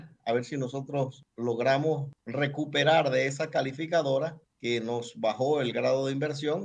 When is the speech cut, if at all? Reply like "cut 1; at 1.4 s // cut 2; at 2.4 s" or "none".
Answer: cut 1; at 1.2 s // cut 2; at 2.2 s // cut 3; at 4.5 s